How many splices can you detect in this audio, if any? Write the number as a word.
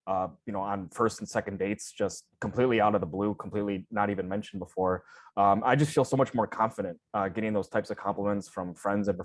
zero